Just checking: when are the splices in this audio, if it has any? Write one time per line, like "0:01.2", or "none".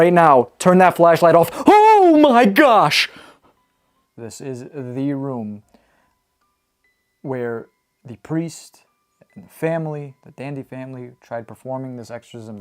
0:04.1